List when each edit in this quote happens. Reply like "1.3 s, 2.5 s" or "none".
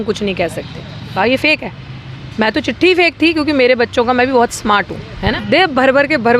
1.1 s, 5.2 s